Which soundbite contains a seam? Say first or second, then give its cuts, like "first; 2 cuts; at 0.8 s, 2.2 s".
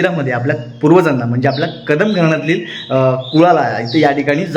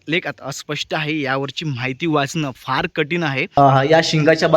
second; 1 cut; at 3.5 s